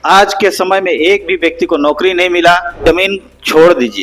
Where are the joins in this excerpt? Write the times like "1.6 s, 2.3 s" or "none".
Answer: 2.8 s